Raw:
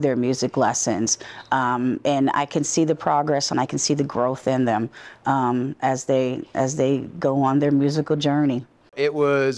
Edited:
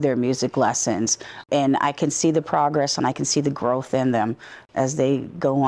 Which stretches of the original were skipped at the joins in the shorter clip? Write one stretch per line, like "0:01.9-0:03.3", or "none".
0:01.5-0:02.0
0:05.1-0:06.4